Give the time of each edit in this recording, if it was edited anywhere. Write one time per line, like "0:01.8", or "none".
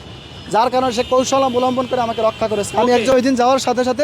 0:03.1